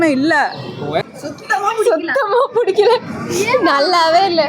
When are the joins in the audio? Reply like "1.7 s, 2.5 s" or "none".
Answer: 1.2 s